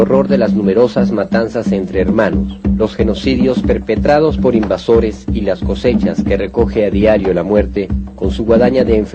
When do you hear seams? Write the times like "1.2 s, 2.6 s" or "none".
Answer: none